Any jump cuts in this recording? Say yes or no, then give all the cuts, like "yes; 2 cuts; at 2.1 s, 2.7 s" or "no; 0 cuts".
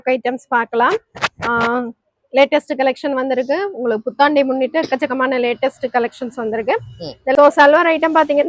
yes; 1 cut; at 7.4 s